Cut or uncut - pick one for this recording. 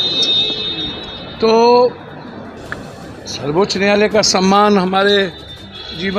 uncut